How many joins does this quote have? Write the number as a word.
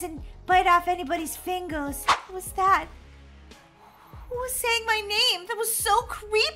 one